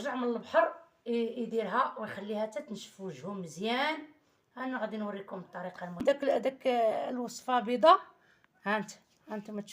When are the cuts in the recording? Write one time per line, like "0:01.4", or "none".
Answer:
0:06.0